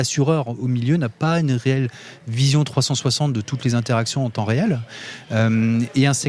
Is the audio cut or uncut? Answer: uncut